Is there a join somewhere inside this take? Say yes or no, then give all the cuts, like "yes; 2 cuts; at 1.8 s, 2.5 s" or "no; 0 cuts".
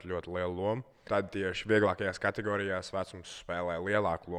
yes; 1 cut; at 0.9 s